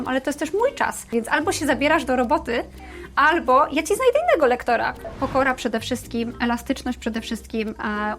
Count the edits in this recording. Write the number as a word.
two